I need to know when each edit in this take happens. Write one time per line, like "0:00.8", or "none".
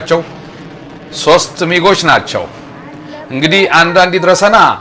none

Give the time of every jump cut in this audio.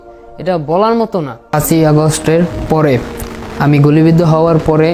0:01.4

